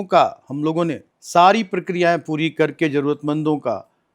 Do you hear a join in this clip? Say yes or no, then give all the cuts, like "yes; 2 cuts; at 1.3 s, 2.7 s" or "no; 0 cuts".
yes; 1 cut; at 1.1 s